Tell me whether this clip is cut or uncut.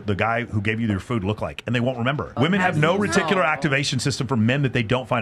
cut